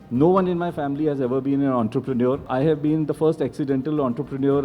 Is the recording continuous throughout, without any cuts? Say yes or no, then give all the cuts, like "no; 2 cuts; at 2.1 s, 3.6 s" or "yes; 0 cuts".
no; 1 cut; at 2.5 s